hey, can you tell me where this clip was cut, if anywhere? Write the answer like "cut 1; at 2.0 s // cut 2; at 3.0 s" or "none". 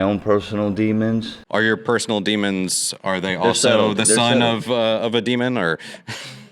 cut 1; at 1.4 s